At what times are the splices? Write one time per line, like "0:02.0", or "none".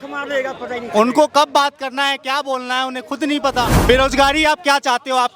0:03.8